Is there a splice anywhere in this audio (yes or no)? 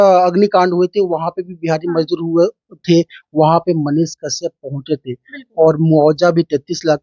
no